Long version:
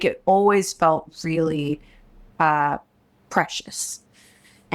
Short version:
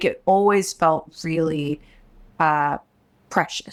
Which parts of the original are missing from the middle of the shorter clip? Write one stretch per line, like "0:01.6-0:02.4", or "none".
none